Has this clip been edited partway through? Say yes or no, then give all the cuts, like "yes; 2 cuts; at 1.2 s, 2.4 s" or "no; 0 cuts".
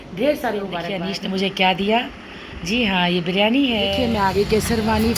yes; 2 cuts; at 1.0 s, 3.9 s